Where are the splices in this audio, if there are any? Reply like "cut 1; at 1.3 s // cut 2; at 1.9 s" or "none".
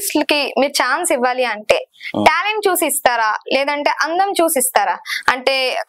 none